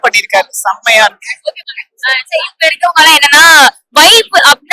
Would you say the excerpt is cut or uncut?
uncut